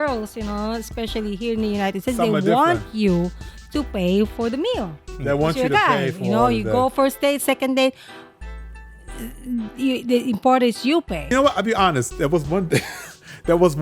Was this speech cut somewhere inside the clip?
yes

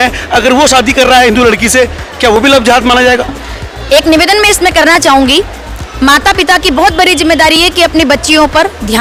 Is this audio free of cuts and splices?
yes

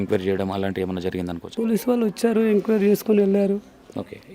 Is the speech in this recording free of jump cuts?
no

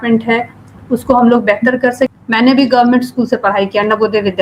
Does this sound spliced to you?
yes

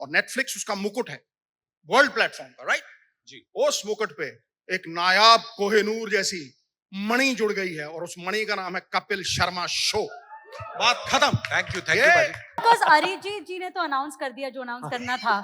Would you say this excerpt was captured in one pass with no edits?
no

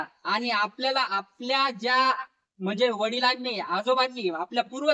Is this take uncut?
yes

